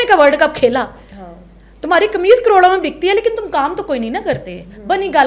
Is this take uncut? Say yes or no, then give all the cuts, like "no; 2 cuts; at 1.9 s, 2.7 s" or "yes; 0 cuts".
yes; 0 cuts